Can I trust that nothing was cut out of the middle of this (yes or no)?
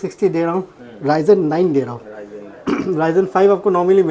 yes